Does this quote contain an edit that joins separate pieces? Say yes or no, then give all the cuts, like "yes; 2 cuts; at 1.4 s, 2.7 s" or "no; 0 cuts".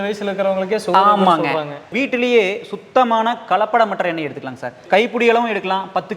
yes; 2 cuts; at 1.9 s, 4.8 s